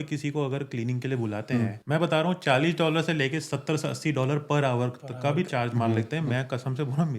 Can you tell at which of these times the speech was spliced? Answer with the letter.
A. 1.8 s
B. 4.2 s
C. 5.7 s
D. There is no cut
A